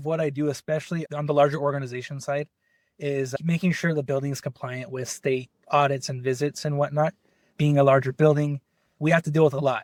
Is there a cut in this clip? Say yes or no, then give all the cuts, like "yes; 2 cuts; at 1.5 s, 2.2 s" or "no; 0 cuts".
no; 0 cuts